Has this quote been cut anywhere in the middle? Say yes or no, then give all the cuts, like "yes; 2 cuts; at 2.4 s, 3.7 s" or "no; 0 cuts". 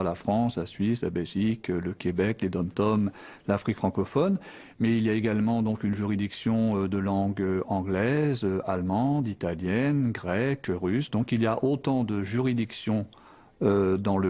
yes; 1 cut; at 6.0 s